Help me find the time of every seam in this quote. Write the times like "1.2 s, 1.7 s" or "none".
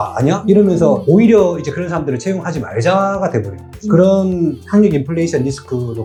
none